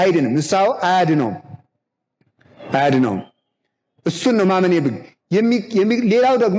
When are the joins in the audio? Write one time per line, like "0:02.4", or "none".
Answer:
none